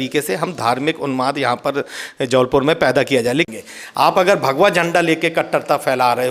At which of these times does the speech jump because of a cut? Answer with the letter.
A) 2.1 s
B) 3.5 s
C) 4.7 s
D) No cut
B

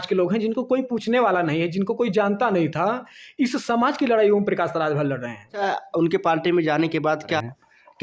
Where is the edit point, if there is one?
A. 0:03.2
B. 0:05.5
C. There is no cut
B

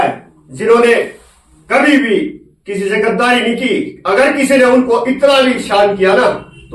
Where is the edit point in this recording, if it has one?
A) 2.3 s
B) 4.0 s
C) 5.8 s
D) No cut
D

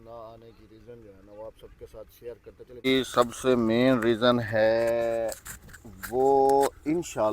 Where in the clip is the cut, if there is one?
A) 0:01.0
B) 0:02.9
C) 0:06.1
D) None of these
B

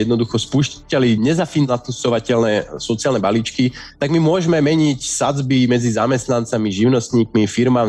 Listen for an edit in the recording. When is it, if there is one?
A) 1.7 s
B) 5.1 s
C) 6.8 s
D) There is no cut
A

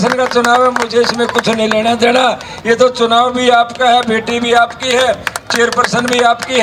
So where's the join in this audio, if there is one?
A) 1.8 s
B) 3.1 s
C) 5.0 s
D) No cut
D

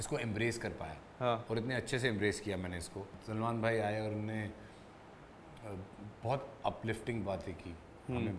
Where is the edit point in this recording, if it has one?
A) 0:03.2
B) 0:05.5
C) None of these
A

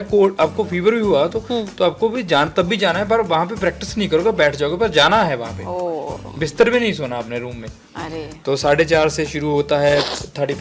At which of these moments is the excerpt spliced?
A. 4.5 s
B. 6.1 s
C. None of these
C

